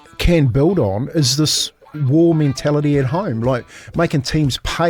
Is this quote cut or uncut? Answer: uncut